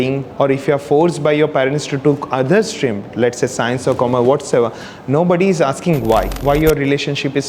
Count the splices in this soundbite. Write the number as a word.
one